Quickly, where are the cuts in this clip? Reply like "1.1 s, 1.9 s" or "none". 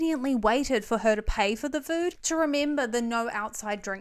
2.2 s

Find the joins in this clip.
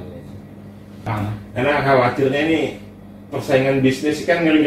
1.1 s

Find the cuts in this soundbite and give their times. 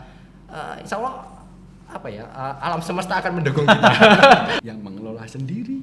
4.5 s

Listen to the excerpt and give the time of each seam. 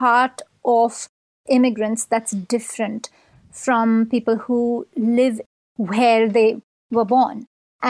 none

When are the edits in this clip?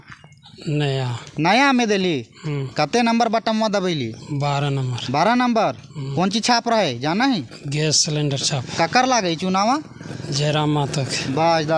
none

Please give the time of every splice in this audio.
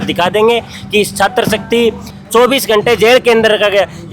2.1 s

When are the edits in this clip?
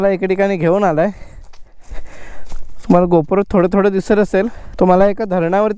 none

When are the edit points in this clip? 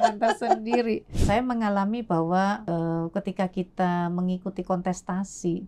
1.1 s, 2.6 s

